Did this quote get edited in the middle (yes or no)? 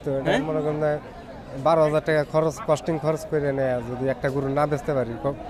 no